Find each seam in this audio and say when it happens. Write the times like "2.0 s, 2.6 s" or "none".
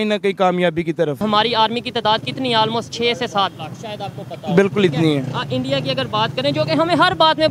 1.2 s